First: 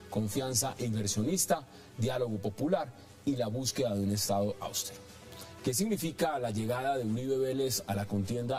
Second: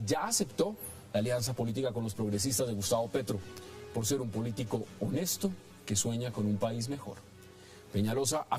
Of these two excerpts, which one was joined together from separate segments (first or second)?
second